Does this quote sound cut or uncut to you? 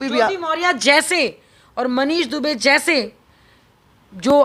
uncut